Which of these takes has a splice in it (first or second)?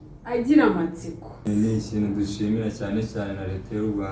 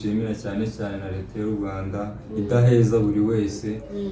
first